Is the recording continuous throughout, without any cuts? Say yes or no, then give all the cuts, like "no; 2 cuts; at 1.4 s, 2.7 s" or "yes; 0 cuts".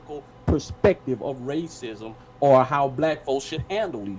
yes; 0 cuts